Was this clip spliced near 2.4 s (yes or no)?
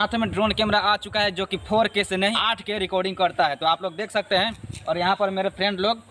yes